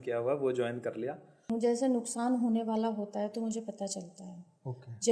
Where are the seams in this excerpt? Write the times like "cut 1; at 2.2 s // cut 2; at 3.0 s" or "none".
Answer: cut 1; at 1.5 s